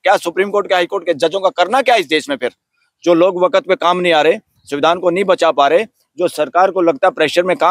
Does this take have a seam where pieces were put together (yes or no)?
no